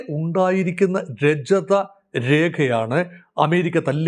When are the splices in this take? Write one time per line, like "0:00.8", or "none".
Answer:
none